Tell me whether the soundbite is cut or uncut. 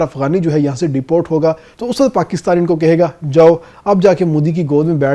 cut